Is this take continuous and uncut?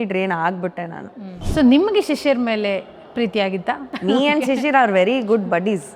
no; 2 cuts; at 1.4 s, 3.9 s

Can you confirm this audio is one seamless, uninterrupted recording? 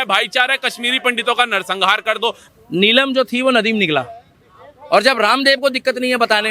no; 1 cut; at 2.4 s

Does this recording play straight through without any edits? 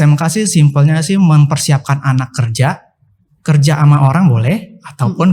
yes; 0 cuts

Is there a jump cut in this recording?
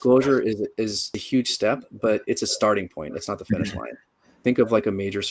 yes; 2 cuts; at 1.2 s, 4.4 s

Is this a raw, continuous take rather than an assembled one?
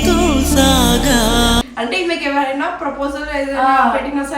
no; 1 cut; at 1.7 s

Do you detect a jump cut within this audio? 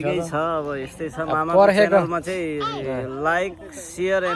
no; 0 cuts

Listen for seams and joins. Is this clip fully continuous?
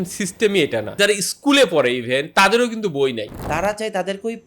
no; 2 cuts; at 0.9 s, 3.3 s

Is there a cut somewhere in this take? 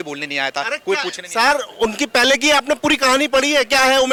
no; 0 cuts

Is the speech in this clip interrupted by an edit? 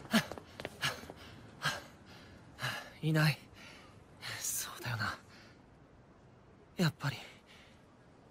no; 0 cuts

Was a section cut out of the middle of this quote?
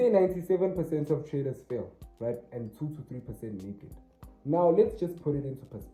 no; 0 cuts

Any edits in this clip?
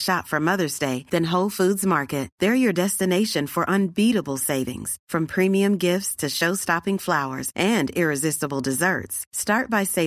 no; 0 cuts

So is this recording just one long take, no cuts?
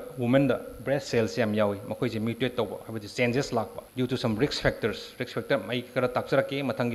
no; 1 cut; at 3.8 s

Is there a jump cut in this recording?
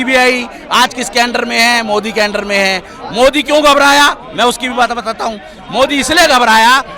no; 0 cuts

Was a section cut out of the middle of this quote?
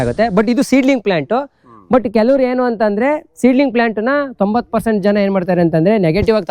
no; 0 cuts

